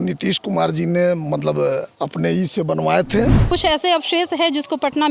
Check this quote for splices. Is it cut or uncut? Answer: cut